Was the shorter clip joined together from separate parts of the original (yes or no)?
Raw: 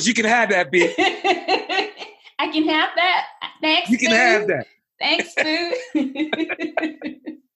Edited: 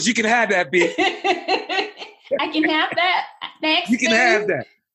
no